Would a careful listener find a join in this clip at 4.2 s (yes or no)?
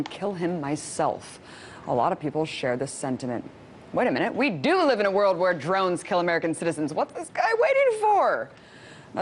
no